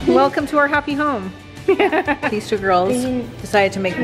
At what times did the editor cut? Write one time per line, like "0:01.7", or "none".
0:02.3